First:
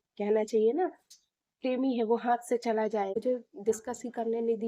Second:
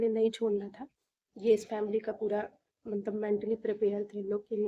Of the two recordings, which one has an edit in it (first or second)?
first